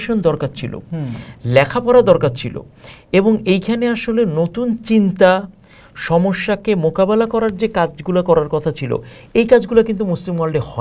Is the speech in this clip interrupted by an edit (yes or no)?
no